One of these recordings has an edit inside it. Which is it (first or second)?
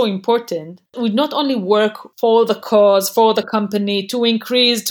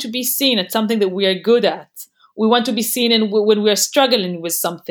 first